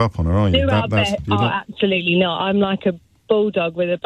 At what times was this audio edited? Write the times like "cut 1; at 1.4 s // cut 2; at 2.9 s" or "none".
none